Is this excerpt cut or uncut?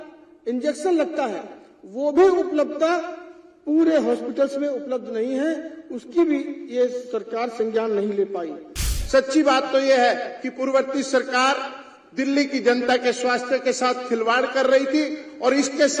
cut